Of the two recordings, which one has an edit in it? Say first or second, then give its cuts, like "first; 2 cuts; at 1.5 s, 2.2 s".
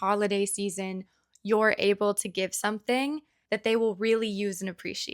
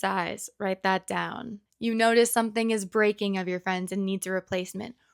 first; 1 cut; at 3.3 s